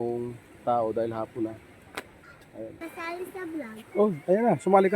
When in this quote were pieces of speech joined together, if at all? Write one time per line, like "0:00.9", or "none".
0:02.8